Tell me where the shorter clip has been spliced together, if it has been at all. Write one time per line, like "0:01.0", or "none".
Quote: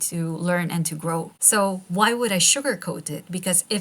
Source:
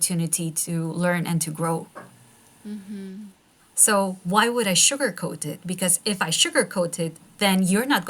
0:01.4